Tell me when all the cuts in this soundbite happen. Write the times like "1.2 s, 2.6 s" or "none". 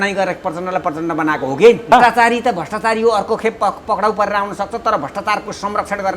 1.9 s

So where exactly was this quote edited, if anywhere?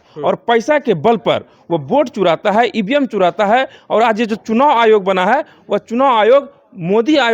none

